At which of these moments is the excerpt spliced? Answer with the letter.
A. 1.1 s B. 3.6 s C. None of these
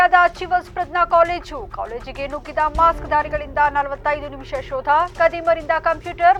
C